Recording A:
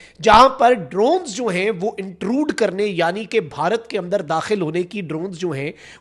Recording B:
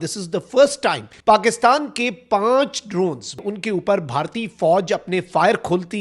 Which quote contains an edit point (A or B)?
B